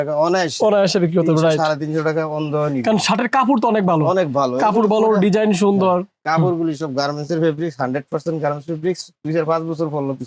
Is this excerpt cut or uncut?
cut